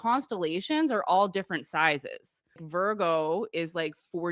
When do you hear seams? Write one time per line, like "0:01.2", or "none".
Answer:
0:02.6